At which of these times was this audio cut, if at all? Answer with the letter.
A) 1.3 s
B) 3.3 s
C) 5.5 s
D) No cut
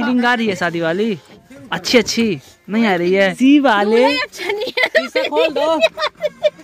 B